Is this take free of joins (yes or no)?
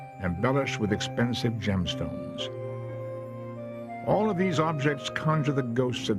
yes